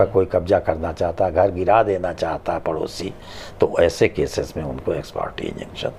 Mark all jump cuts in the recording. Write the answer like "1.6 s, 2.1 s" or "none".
none

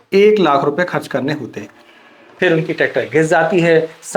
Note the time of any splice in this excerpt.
2.2 s

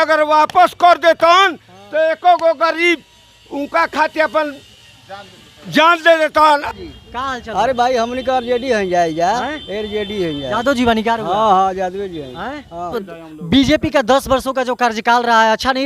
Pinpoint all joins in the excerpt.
6.7 s, 12.9 s

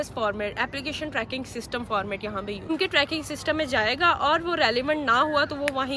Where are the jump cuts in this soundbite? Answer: 2.7 s

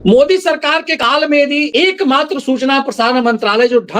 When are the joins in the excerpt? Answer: 1.0 s, 1.7 s

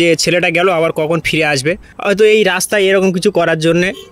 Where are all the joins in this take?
1.9 s

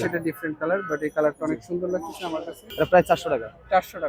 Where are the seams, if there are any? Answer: 2.7 s

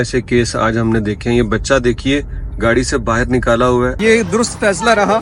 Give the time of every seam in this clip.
4.0 s

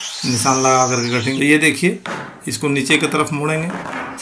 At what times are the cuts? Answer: 1.3 s

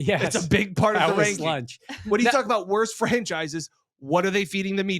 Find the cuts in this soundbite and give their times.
none

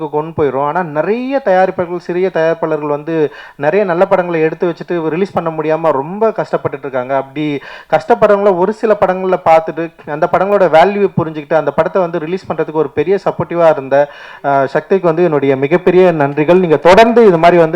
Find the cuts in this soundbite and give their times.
none

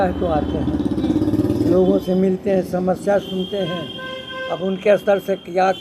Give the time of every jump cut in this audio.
none

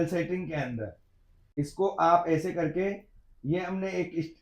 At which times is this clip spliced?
1.6 s

